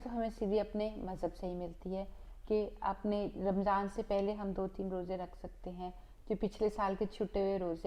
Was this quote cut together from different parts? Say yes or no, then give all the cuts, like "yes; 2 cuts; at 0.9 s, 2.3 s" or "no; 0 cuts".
no; 0 cuts